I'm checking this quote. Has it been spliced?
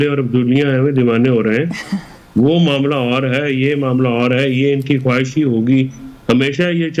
no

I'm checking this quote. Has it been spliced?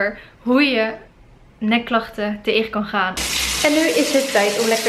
yes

